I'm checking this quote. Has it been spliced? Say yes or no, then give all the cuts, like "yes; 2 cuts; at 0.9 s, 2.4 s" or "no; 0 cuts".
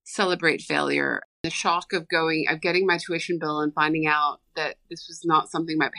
yes; 1 cut; at 1.4 s